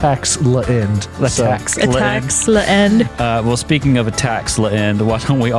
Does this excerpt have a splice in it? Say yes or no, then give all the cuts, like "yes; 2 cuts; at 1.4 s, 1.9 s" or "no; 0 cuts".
yes; 2 cuts; at 1.0 s, 3.1 s